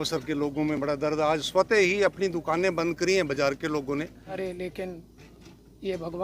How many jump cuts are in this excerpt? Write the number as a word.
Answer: one